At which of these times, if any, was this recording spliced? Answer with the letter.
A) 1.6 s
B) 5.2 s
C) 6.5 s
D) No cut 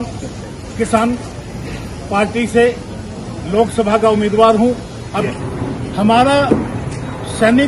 B